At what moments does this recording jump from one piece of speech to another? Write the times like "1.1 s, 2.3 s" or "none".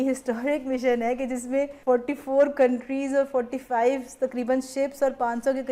1.8 s